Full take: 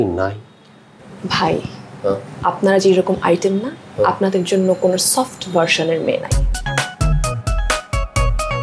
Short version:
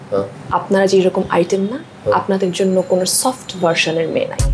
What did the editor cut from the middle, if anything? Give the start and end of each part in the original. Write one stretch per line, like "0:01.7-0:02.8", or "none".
none